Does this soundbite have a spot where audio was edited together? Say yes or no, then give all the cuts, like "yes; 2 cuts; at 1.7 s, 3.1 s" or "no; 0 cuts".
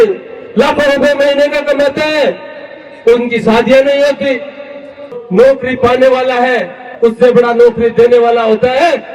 yes; 1 cut; at 5.1 s